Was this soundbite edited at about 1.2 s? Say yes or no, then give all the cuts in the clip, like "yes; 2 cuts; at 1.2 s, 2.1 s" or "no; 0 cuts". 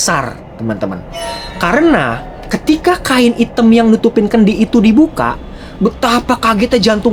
no; 0 cuts